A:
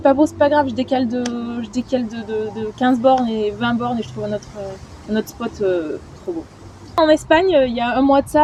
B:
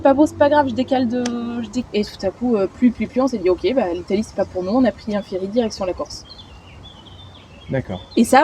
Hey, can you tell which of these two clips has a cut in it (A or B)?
B